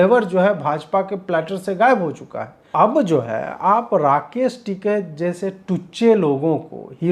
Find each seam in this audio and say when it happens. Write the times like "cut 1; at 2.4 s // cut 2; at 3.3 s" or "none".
cut 1; at 2.7 s